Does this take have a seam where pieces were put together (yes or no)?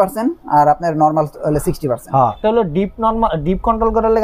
yes